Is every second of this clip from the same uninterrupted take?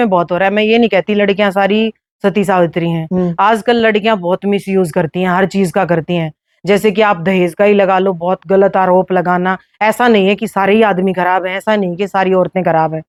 yes; 0 cuts

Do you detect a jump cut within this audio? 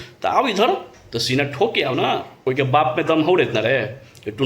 yes; 1 cut; at 2.4 s

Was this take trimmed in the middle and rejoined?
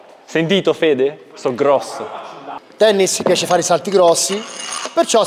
yes; 1 cut; at 2.6 s

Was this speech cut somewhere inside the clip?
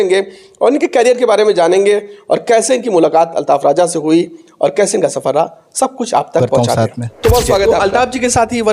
yes; 1 cut; at 7.7 s

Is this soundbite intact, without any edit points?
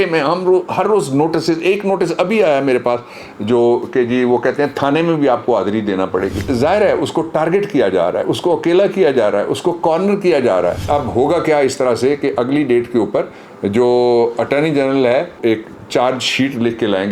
no; 3 cuts; at 6.4 s, 10.9 s, 15.4 s

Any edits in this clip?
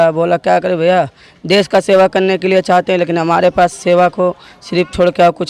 no; 0 cuts

